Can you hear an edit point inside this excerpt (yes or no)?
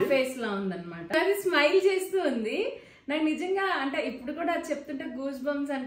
yes